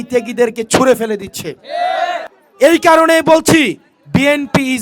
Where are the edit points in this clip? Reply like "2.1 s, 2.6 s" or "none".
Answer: 2.4 s